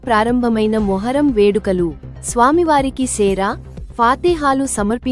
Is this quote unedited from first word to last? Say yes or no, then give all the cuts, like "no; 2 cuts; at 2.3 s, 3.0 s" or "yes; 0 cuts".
yes; 0 cuts